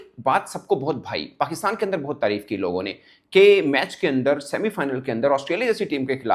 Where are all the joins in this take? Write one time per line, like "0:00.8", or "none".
none